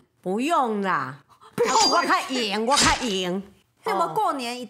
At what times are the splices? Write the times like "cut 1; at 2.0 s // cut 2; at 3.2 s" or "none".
cut 1; at 3.8 s